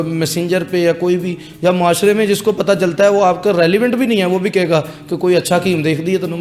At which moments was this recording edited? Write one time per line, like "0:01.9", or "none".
none